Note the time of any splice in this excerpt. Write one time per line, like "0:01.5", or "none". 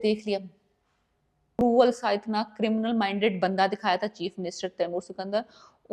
0:01.6